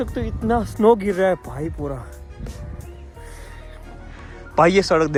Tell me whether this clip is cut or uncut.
uncut